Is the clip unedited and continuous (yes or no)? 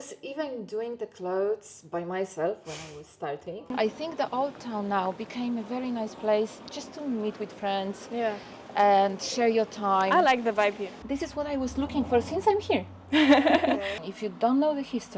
no